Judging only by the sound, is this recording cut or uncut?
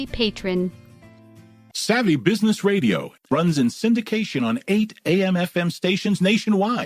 cut